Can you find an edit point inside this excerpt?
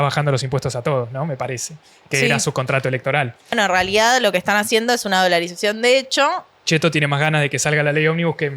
yes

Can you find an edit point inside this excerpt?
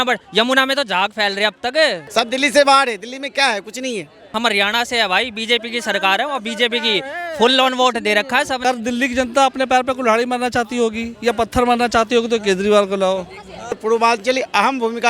yes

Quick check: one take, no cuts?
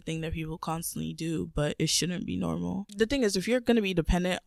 yes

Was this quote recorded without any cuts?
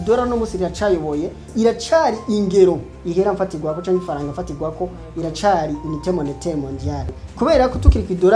no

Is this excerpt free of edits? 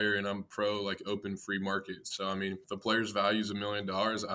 no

